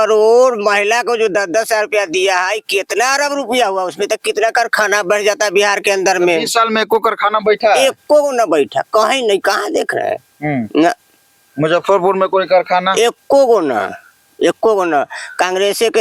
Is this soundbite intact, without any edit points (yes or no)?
yes